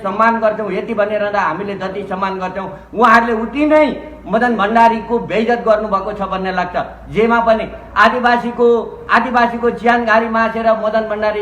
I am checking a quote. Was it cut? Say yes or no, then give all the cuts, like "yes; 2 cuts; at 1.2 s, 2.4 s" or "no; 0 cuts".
no; 0 cuts